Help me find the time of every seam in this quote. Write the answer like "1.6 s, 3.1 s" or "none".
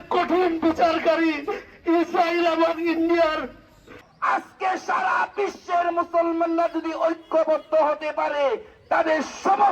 4.1 s